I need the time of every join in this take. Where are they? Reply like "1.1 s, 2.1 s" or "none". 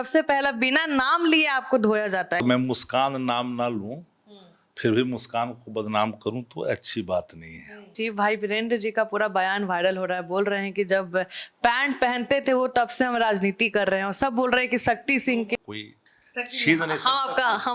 2.4 s, 7.9 s, 15.6 s